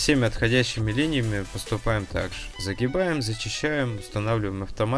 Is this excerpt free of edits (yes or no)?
yes